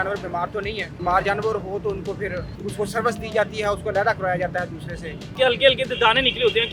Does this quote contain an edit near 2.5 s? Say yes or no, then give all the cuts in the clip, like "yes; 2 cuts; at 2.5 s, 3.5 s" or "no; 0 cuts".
yes; 3 cuts; at 1.0 s, 2.5 s, 5.3 s